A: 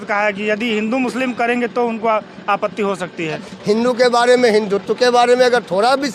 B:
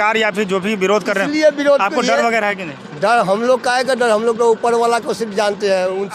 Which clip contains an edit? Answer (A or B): A